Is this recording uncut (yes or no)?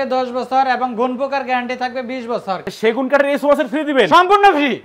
no